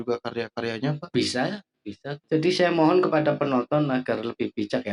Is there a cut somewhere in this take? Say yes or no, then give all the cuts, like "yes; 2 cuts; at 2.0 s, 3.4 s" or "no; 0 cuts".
yes; 1 cut; at 2.1 s